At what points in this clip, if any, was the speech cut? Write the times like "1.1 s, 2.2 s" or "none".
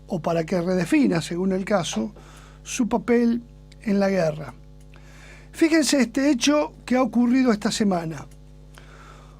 5.4 s